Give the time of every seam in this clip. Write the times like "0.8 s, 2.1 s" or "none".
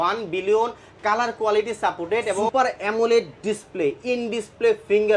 2.5 s